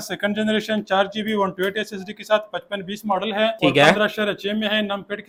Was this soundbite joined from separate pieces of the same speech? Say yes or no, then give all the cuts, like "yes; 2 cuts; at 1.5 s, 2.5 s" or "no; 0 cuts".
no; 0 cuts